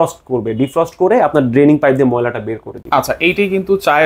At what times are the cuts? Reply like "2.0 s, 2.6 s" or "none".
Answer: none